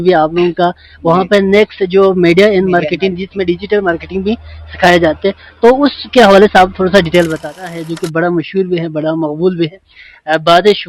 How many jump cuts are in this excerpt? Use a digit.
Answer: 1